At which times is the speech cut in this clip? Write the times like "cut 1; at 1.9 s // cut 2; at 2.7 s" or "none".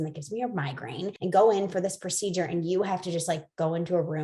cut 1; at 1.2 s